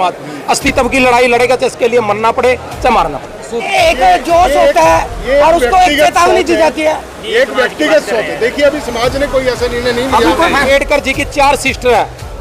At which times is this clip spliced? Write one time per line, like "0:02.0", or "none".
0:03.7
0:10.7

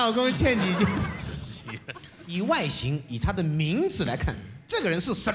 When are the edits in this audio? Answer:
0:02.2

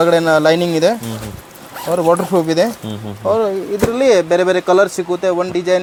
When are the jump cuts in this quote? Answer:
none

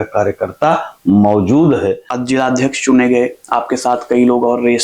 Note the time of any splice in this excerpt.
0:02.1

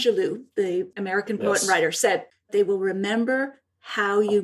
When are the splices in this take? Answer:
0:02.5

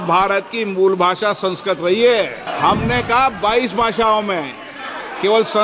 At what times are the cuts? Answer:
0:02.4

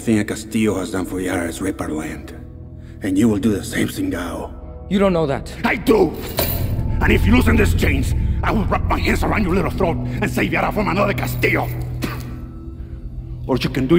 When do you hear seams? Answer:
none

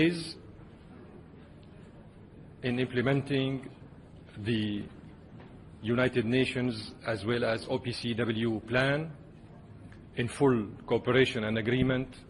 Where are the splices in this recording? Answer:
0:06.1

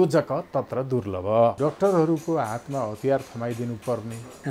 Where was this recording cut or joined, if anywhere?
0:01.6

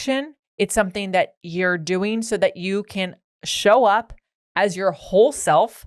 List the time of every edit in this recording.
none

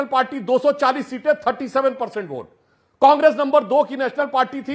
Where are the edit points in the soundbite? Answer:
none

